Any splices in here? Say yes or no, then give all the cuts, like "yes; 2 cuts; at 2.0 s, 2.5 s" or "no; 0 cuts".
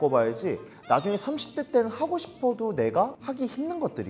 yes; 1 cut; at 3.2 s